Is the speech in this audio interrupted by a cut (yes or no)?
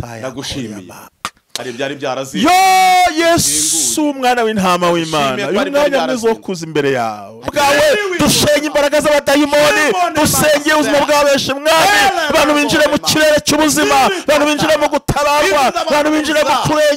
yes